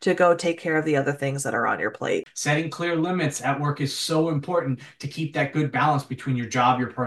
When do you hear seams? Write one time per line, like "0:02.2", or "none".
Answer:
0:02.3